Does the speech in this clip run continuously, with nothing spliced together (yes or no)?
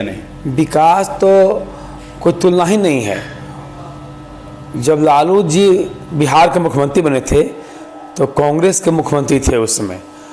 yes